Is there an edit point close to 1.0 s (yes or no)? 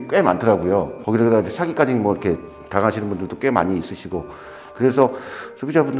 yes